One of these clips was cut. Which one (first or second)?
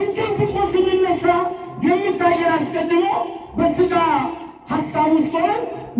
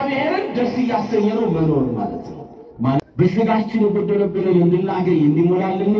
second